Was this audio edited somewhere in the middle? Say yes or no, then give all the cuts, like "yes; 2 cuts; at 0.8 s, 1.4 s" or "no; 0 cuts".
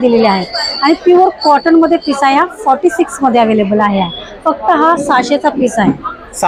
no; 0 cuts